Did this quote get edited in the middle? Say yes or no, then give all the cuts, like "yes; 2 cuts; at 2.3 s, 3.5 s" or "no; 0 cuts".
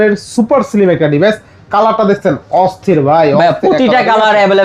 no; 0 cuts